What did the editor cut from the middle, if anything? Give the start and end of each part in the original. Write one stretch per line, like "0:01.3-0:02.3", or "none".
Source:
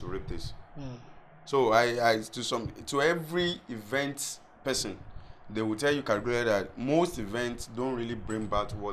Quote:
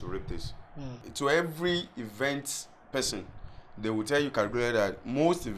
0:01.0-0:02.8